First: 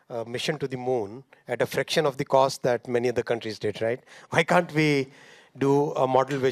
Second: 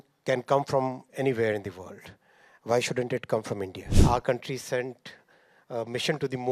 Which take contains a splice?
second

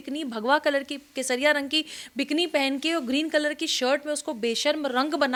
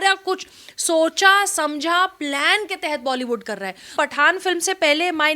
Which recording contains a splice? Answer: second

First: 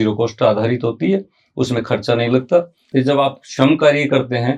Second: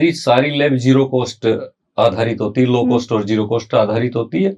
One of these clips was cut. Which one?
first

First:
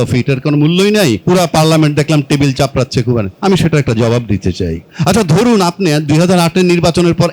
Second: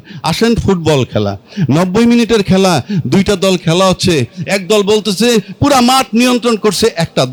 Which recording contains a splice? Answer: first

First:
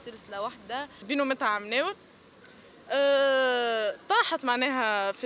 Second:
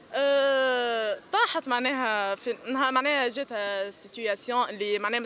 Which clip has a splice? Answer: first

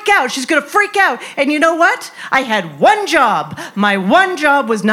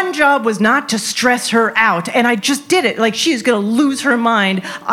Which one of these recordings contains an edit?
second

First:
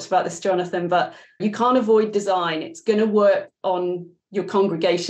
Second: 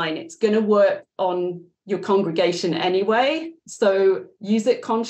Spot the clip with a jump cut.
first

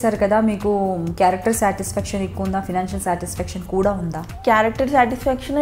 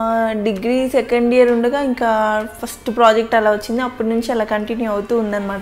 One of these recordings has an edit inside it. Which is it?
first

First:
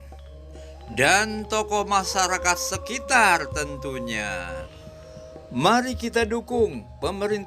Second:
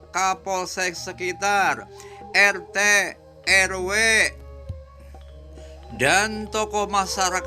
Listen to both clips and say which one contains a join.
first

